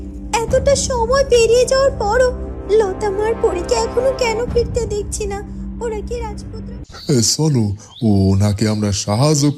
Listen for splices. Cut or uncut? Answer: cut